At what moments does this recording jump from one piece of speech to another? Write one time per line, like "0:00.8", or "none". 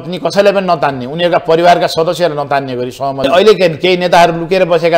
0:03.2